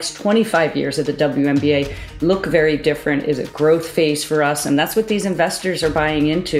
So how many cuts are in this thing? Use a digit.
0